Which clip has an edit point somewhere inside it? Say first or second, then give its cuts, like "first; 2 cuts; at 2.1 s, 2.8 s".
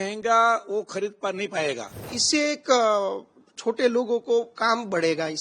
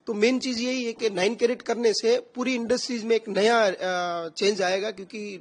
first; 1 cut; at 2.2 s